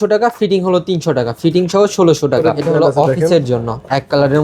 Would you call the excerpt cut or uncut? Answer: cut